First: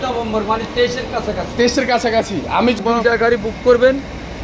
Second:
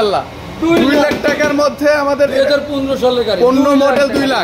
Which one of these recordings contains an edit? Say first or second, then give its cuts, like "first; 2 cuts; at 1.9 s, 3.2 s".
first; 1 cut; at 2.8 s